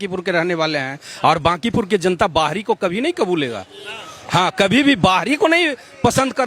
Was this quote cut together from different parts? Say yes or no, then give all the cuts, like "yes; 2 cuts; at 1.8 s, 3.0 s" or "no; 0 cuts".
no; 0 cuts